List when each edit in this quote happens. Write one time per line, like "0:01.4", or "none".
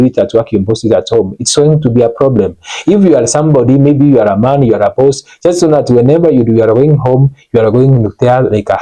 none